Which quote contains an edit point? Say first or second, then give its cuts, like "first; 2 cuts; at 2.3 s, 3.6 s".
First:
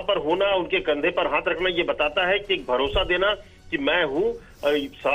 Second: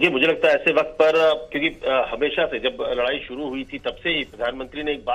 first; 1 cut; at 3.1 s